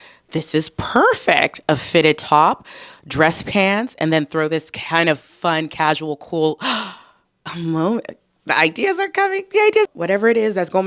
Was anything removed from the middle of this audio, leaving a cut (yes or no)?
yes